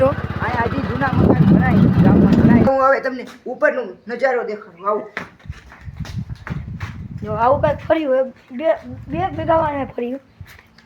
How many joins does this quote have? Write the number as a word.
one